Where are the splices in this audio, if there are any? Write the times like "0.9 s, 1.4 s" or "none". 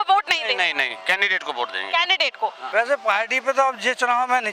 2.6 s